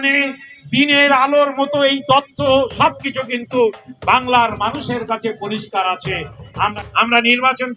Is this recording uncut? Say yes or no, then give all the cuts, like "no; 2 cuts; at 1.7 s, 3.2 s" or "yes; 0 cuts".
no; 1 cut; at 6.7 s